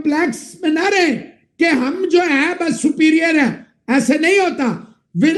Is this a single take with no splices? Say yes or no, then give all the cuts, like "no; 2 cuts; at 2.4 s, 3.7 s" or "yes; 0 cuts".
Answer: yes; 0 cuts